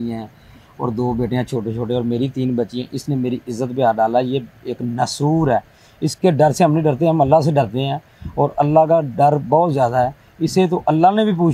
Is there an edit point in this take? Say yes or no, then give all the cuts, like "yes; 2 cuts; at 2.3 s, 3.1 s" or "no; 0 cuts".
no; 0 cuts